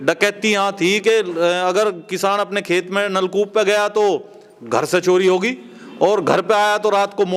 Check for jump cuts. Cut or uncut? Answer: uncut